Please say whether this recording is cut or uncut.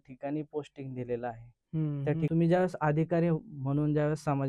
cut